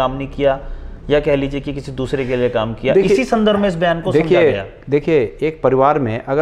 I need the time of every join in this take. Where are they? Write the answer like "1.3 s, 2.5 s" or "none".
none